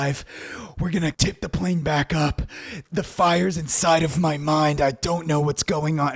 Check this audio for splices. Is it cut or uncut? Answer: cut